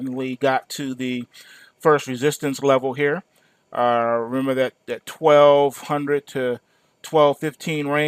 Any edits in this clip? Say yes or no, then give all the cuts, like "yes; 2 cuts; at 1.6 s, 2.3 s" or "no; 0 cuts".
no; 0 cuts